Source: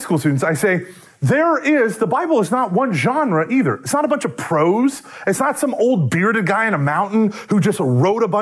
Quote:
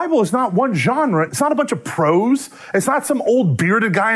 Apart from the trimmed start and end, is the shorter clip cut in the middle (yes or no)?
yes